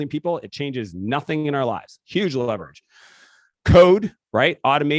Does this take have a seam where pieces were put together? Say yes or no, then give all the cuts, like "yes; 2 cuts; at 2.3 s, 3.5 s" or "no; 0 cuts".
no; 0 cuts